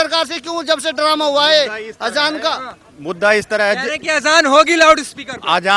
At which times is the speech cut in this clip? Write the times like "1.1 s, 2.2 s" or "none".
none